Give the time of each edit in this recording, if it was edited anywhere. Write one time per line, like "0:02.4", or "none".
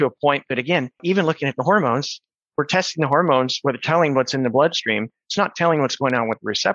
0:00.9

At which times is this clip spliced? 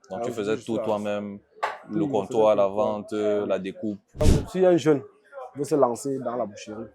0:04.2

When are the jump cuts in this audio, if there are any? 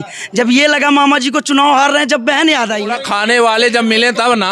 0:02.8

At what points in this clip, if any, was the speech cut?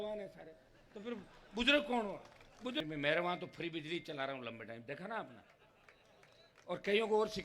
0:02.8

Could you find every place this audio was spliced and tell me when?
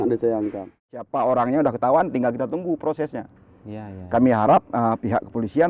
0:01.1

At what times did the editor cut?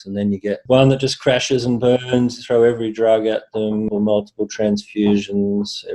0:03.9

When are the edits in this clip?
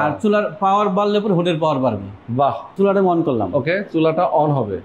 0:02.7

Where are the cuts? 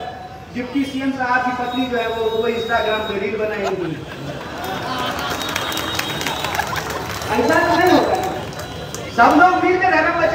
none

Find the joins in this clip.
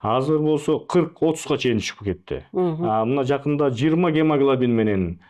none

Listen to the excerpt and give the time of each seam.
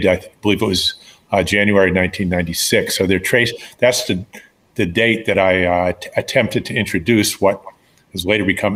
none

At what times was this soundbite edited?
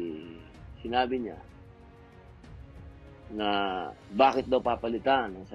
none

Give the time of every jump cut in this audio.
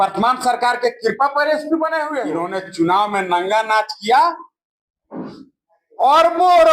0:02.3

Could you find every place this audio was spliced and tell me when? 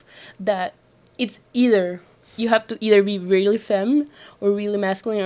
none

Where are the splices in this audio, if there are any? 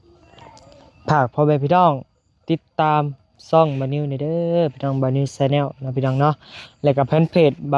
none

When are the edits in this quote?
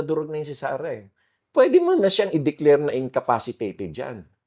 0:01.4

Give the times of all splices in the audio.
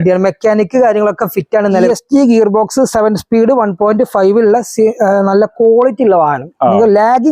0:01.8

